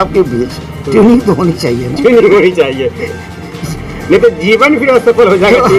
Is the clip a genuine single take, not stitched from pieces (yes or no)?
yes